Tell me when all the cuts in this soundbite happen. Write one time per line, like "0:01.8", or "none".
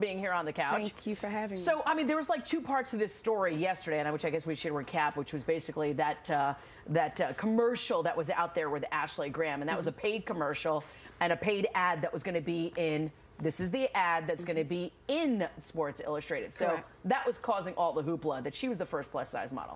0:14.1